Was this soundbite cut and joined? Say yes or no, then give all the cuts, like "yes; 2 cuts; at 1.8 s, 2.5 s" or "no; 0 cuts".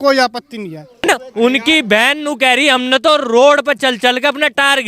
yes; 1 cut; at 1.0 s